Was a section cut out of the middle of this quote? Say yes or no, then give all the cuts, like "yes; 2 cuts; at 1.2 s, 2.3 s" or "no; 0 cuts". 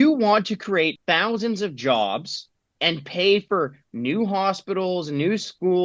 yes; 1 cut; at 1.0 s